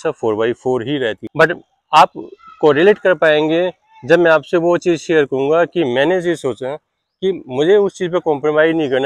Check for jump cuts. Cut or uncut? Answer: cut